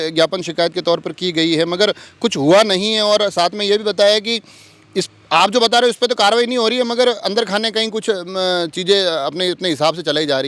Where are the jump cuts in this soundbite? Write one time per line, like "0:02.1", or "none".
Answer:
none